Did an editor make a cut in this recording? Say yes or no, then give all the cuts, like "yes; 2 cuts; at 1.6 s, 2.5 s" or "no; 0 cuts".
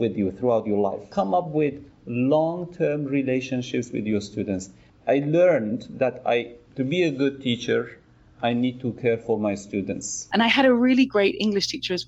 yes; 3 cuts; at 1.0 s, 4.8 s, 10.1 s